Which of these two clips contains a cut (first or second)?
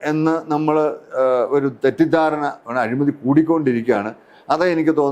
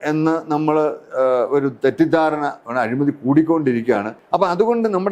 second